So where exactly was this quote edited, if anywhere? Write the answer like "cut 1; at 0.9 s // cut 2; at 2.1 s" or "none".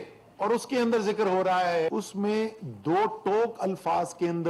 cut 1; at 1.9 s